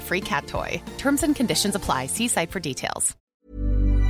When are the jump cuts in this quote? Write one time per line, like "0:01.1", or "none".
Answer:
0:03.2

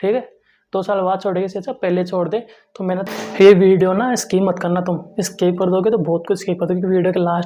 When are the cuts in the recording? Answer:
0:03.1

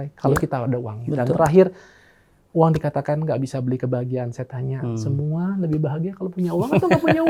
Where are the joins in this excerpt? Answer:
none

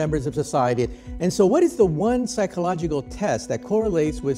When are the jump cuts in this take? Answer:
none

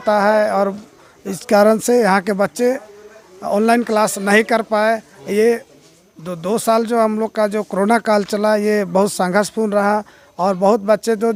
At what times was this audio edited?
none

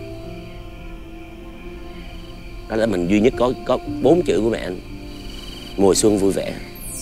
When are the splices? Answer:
none

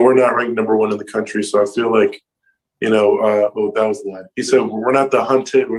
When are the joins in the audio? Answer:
none

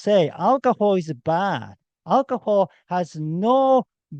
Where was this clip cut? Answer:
none

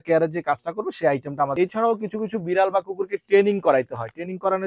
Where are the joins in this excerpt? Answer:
0:01.5

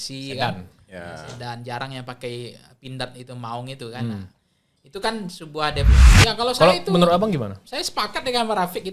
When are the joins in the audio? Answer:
0:05.9

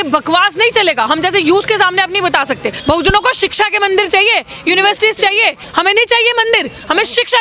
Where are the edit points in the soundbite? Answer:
0:02.8
0:05.6

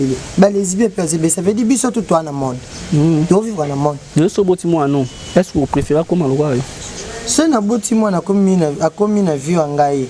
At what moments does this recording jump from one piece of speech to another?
none

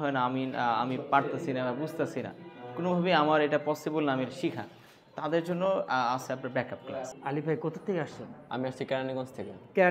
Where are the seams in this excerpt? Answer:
0:07.1

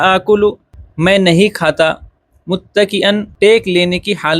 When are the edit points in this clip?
0:01.1
0:03.3

